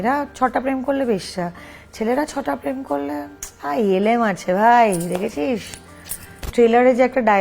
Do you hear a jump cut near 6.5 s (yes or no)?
yes